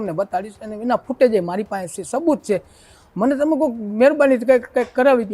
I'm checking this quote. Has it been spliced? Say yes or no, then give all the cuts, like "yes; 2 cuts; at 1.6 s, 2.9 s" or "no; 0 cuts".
no; 0 cuts